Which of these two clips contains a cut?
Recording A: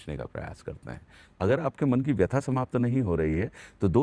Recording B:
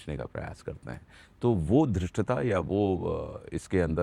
A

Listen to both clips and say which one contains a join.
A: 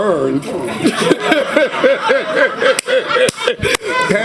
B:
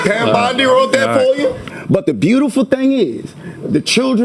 B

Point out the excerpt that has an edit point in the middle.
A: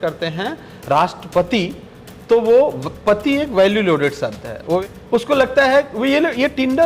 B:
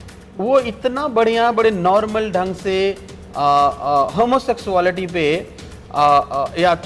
A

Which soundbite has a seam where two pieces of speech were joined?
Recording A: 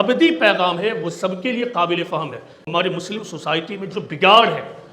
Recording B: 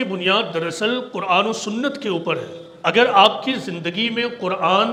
A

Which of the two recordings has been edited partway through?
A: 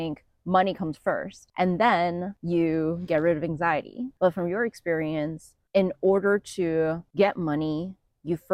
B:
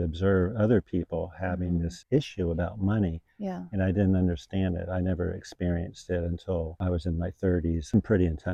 A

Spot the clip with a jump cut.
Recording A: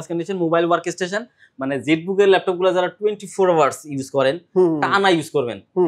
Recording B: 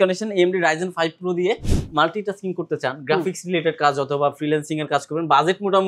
B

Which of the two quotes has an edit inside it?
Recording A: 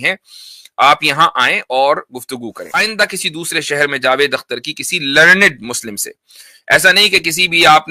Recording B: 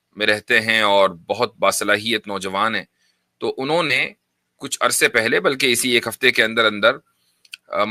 A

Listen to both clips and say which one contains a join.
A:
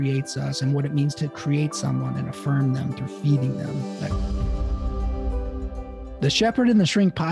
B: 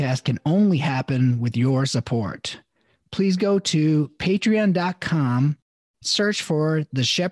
A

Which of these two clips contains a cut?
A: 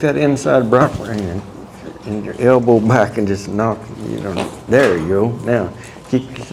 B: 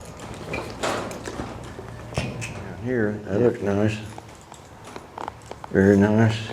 B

